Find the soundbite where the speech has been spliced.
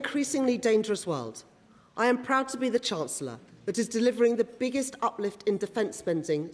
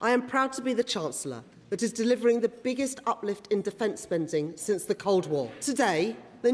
second; 1 cut; at 5.5 s

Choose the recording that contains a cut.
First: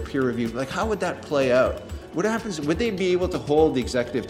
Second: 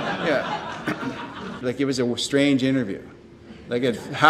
second; 1 cut; at 1.6 s

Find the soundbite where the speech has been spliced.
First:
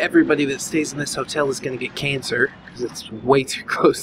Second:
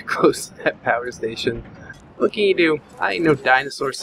second; 2 cuts; at 1.4 s, 2.9 s

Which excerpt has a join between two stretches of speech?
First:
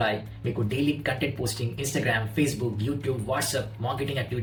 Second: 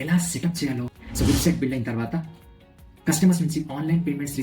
second; 1 cut; at 1.0 s

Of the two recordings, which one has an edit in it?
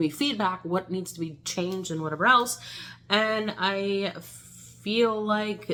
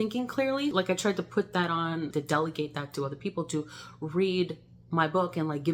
second; 2 cuts; at 0.7 s, 2.1 s

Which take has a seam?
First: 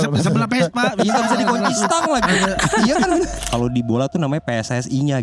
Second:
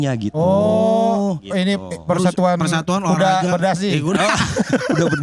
first; 1 cut; at 3.4 s

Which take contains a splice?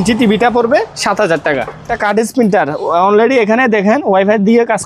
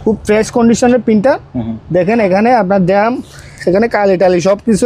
first; 1 cut; at 1.9 s

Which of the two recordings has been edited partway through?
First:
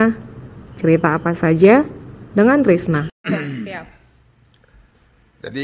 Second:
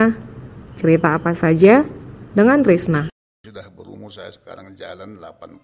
second; 1 cut; at 3.2 s

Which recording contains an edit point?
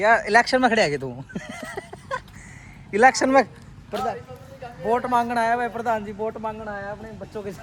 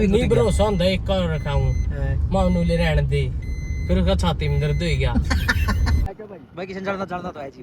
second; 1 cut; at 6.1 s

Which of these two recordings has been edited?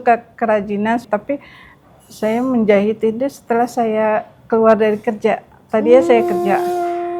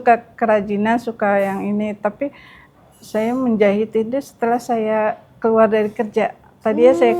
first; 1 cut; at 1.1 s

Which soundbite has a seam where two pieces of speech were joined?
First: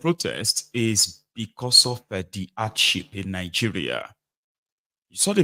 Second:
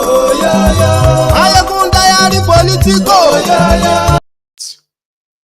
second; 1 cut; at 4.2 s

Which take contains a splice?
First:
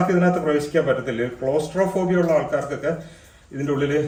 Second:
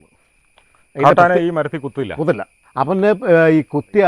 second; 1 cut; at 2.6 s

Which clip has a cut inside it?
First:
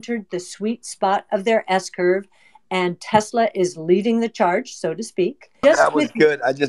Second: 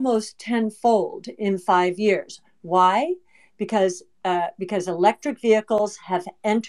first; 1 cut; at 5.5 s

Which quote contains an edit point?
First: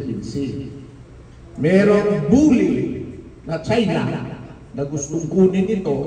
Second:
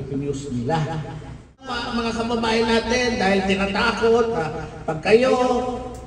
second; 1 cut; at 1.6 s

